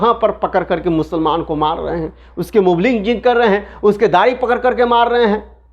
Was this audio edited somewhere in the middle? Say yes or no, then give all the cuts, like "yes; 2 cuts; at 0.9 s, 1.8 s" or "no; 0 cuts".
no; 0 cuts